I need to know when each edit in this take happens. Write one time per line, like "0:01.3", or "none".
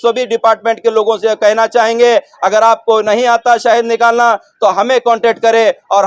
none